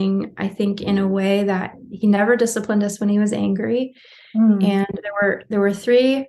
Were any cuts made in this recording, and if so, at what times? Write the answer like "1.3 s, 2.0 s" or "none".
none

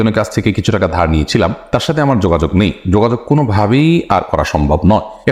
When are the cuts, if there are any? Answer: none

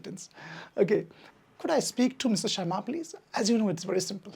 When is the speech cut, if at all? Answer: 1.2 s

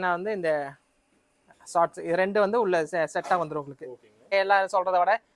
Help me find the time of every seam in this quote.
4.3 s

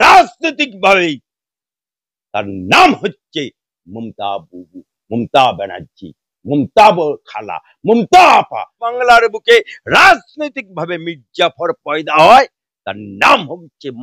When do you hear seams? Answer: 8.8 s

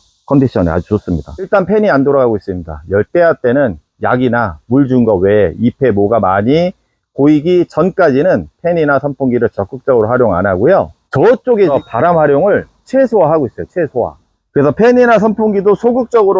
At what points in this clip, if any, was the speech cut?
1.5 s, 11.7 s

